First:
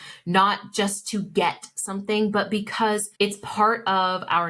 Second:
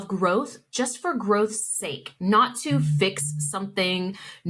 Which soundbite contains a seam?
first; 1 cut; at 3.1 s

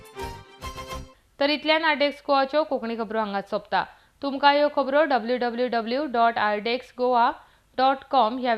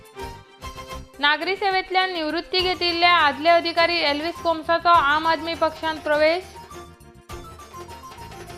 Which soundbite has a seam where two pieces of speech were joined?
second; 1 cut; at 1.0 s

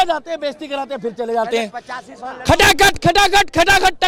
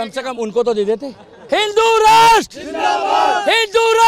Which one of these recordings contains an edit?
second; 1 cut; at 1.3 s

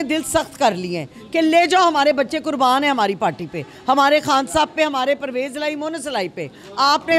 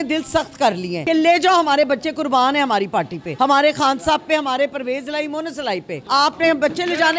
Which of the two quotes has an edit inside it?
second; 3 cuts; at 0.9 s, 3.2 s, 6.0 s

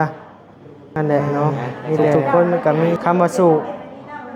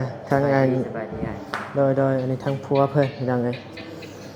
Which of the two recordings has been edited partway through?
first; 1 cut; at 3.0 s

